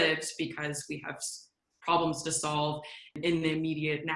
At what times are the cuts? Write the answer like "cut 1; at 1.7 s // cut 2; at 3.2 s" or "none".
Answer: cut 1; at 3.1 s